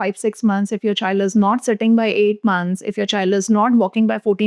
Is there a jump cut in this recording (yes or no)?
no